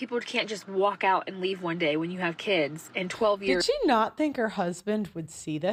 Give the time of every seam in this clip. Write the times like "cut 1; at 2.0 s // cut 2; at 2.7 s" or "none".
none